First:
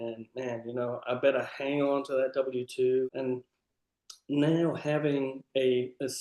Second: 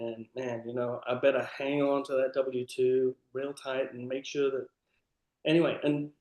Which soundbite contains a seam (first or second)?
first